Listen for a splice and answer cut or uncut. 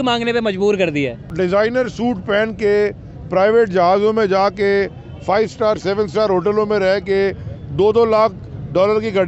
cut